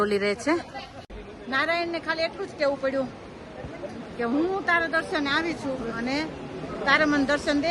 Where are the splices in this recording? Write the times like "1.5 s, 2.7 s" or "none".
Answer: 1.2 s